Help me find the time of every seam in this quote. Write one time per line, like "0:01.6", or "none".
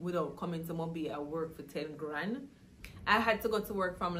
none